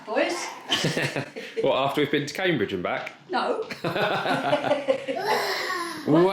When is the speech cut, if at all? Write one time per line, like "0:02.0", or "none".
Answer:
none